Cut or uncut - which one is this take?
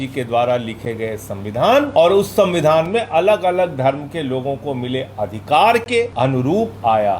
cut